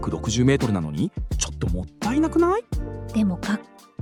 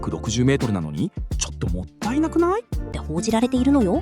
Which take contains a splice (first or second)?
second